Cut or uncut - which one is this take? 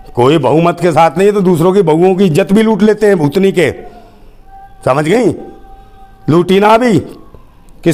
uncut